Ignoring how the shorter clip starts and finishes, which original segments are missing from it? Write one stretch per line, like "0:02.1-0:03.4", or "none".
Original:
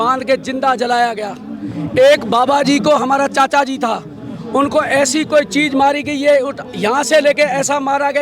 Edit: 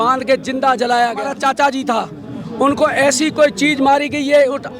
0:01.4-0:03.3

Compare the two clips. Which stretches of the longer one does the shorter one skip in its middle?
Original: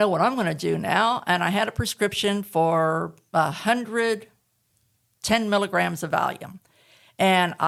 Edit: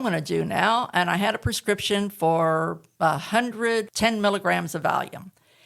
0:04.2-0:05.2

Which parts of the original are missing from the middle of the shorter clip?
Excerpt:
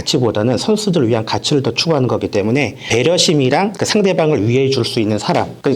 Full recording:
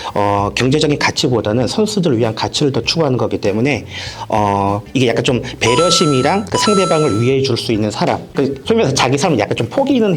0:03.9-0:05.5

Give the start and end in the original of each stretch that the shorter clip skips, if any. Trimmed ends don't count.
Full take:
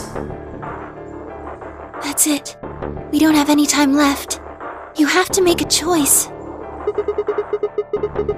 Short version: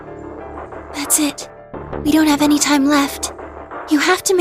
0:01.9-0:02.0

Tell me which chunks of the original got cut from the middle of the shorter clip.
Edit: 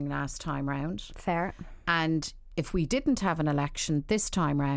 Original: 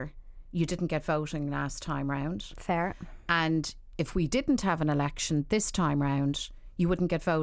none

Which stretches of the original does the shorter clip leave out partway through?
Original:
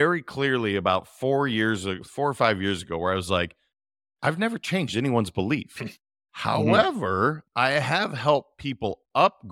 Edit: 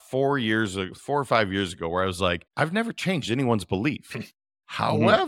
0:03.5-0:04.1

